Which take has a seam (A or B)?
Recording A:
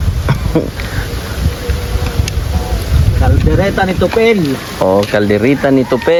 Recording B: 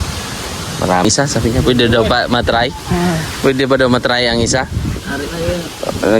B